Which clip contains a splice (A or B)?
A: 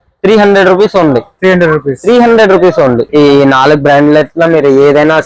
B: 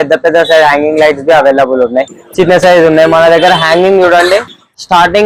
A